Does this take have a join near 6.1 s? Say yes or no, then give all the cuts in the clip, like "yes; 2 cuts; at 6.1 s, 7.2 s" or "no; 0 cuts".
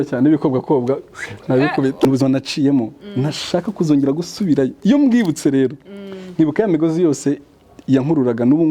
no; 1 cut; at 2.1 s